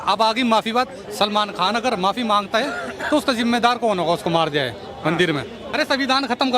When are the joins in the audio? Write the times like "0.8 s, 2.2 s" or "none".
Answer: 5.6 s